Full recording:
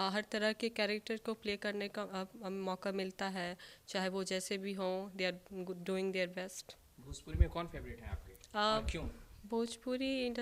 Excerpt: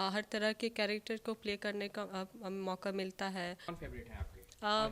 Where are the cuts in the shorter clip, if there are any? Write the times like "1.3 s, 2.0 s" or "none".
3.7 s